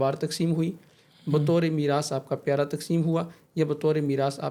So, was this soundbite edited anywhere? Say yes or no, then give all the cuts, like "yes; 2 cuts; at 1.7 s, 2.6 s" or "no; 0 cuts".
no; 0 cuts